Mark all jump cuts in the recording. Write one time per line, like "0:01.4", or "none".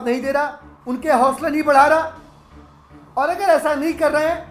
none

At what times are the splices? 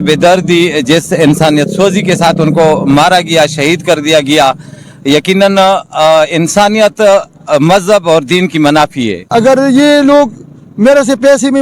0:09.2

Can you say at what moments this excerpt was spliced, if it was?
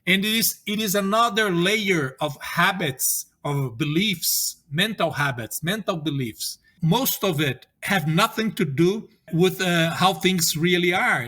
0:06.7
0:07.7
0:09.2

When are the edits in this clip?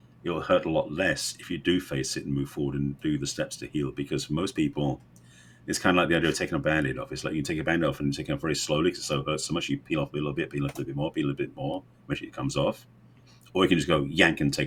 none

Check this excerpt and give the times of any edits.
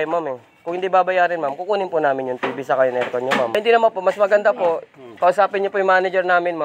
0:03.6

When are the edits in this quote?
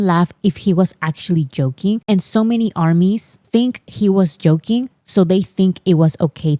none

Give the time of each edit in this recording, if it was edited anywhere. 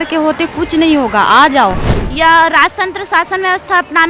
0:02.0

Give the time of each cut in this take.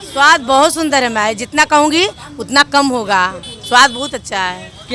none

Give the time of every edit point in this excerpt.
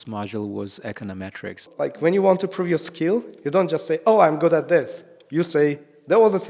0:01.6

